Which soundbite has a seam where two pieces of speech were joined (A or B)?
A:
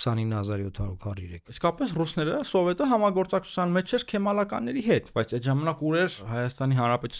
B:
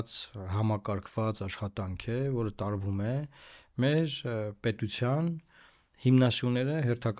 A